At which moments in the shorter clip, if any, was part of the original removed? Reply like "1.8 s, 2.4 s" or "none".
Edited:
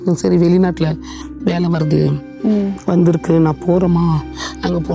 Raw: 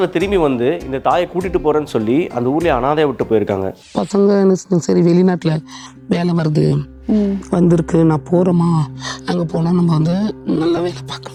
none

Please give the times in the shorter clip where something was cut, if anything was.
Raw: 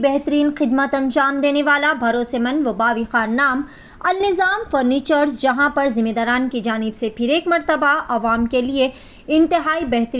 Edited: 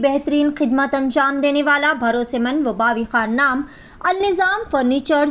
none

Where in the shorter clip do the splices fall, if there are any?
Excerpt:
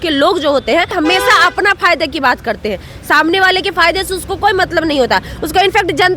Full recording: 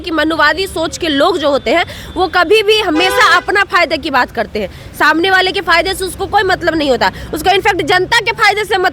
0.9 s

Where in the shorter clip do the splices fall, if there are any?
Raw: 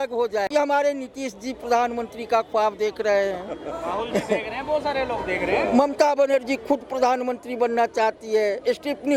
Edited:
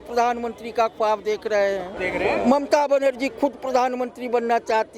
2.0 s

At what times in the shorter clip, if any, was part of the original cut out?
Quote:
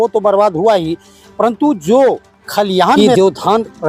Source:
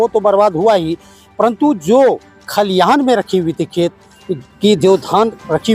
3.0 s

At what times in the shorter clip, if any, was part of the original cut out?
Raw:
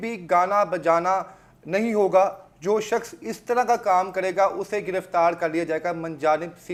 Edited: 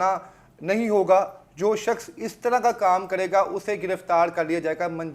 none

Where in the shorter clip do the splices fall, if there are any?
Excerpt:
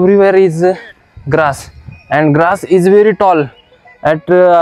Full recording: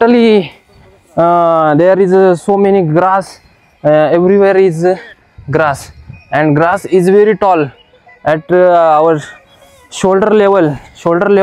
none

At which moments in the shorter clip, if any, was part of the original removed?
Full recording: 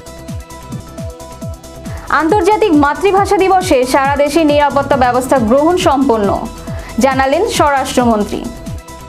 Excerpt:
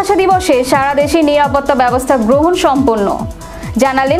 none

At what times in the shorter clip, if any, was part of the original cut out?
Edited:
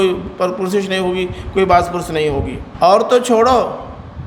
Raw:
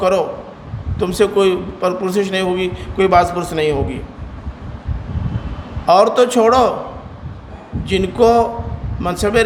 2.6 s

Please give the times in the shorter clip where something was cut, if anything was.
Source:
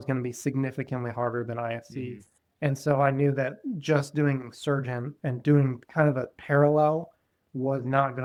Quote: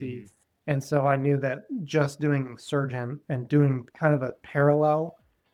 none

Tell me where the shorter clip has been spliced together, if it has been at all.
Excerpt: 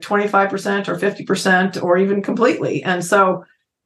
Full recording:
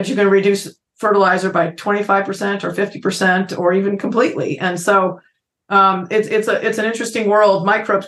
none

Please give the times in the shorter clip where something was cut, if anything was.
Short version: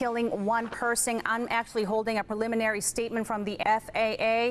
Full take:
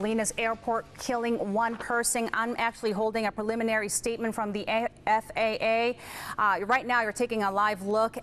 3.6 s

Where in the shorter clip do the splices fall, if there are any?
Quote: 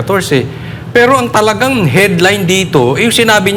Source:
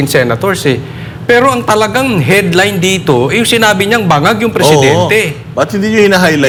none

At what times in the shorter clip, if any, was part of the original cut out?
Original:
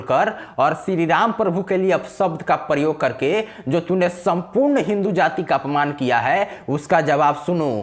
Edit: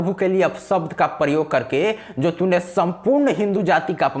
none

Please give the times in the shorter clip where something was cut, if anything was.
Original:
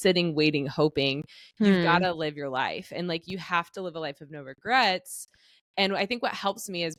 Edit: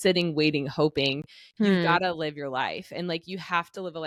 none

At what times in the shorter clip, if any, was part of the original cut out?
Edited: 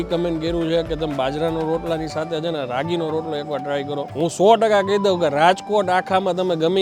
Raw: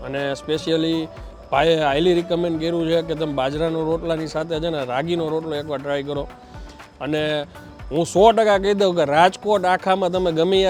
4.1 s

